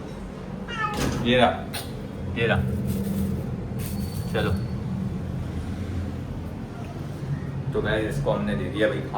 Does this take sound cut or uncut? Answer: uncut